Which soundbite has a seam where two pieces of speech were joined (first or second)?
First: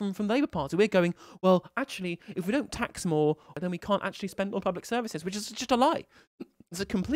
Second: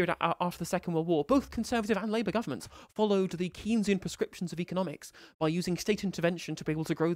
first